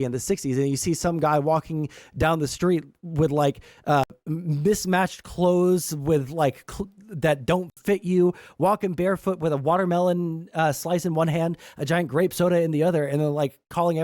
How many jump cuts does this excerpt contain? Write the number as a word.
two